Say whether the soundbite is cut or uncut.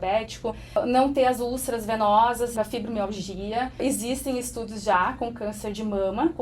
cut